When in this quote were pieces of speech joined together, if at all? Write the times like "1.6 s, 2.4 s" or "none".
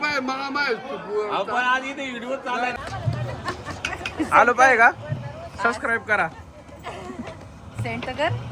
2.7 s